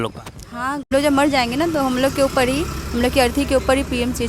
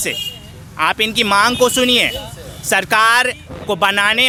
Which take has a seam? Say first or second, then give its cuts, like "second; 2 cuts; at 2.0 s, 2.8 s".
first; 1 cut; at 0.9 s